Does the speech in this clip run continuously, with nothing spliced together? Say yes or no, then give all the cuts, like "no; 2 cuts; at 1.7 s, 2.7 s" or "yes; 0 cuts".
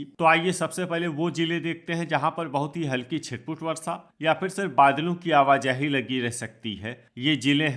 yes; 0 cuts